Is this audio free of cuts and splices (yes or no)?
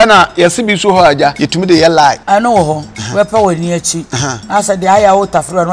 no